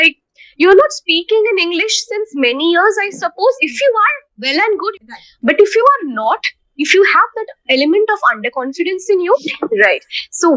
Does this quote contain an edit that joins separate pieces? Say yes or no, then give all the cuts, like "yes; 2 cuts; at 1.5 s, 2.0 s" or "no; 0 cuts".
yes; 2 cuts; at 4.9 s, 9.3 s